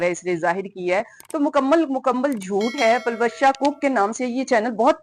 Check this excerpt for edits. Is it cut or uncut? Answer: uncut